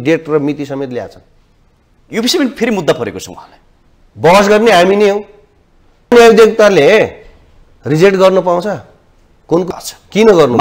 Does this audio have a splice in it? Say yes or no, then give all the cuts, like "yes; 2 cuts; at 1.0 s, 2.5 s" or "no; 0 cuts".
yes; 2 cuts; at 6.1 s, 9.7 s